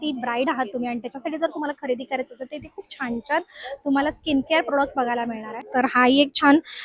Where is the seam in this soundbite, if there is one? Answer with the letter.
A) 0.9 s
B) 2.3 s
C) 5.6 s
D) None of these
C